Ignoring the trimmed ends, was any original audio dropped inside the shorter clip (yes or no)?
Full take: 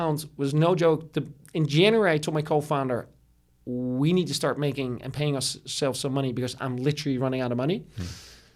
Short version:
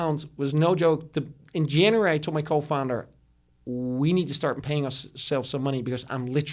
yes